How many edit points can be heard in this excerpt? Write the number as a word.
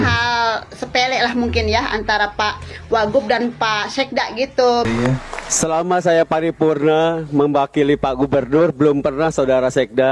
one